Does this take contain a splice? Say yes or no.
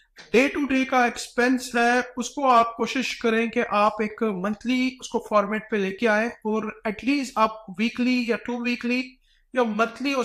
no